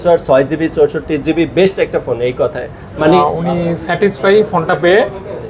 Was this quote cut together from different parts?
yes; 1 cut; at 3.2 s

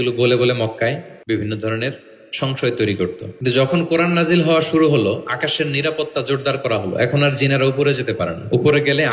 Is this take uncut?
no; 2 cuts; at 1.1 s, 3.3 s

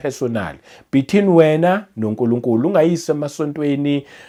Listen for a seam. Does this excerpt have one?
no; 0 cuts

